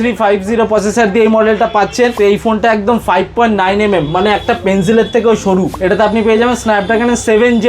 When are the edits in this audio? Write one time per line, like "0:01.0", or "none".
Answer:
0:02.1
0:05.7